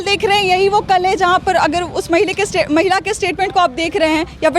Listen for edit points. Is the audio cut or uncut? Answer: uncut